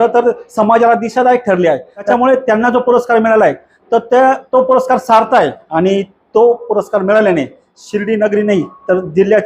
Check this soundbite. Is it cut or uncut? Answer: cut